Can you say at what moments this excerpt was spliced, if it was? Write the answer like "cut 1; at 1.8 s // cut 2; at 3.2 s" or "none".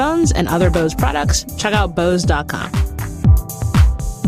cut 1; at 3.2 s